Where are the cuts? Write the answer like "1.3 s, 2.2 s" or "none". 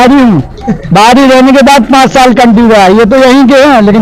none